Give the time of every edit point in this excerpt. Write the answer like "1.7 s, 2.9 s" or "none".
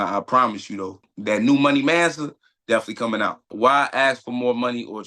1.1 s, 3.5 s